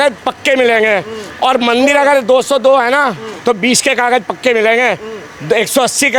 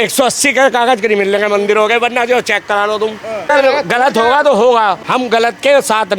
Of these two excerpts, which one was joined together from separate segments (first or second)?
second